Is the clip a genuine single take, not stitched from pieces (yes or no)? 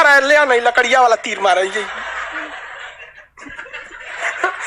yes